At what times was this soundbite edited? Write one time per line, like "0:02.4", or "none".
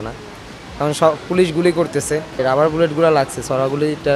0:02.4